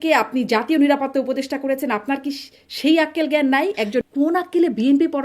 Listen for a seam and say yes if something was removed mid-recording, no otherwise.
yes